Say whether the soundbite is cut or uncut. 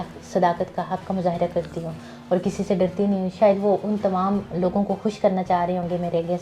uncut